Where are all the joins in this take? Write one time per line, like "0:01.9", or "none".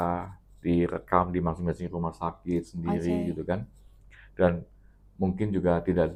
none